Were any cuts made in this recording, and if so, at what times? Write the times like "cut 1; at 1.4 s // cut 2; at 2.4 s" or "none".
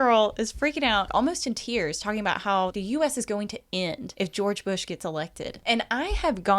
cut 1; at 1.1 s // cut 2; at 2.7 s // cut 3; at 4.0 s // cut 4; at 5.5 s